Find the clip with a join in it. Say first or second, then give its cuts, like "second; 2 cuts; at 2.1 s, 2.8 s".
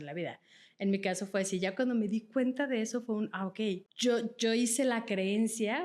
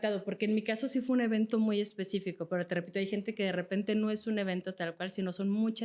first; 1 cut; at 3.9 s